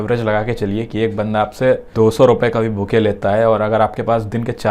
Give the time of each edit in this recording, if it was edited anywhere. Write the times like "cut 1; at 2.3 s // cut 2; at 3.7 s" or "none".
cut 1; at 1.9 s

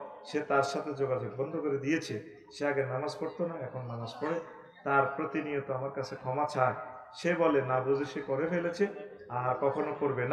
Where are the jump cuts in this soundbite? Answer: none

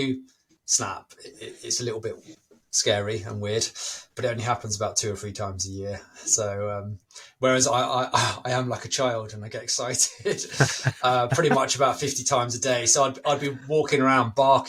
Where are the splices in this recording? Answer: none

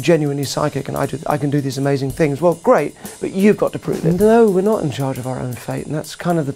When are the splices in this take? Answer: cut 1; at 4.0 s

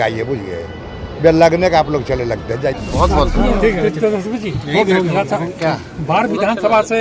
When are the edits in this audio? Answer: cut 1; at 2.8 s

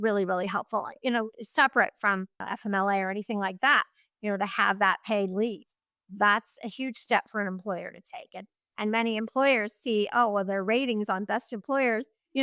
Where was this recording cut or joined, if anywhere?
none

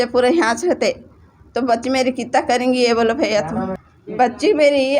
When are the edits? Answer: cut 1; at 3.8 s

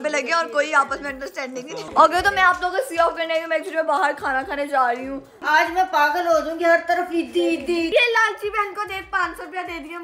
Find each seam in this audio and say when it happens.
cut 1; at 1.9 s // cut 2; at 5.4 s // cut 3; at 7.9 s

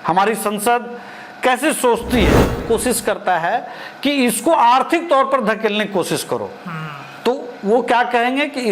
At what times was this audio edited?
cut 1; at 2.6 s

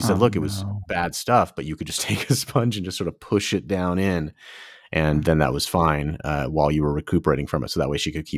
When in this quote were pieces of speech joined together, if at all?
none

